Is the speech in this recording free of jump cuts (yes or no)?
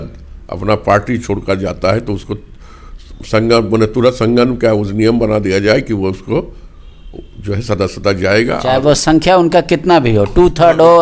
yes